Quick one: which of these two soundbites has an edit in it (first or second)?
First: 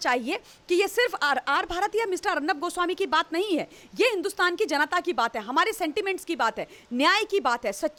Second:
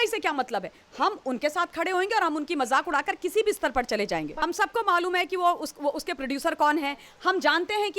second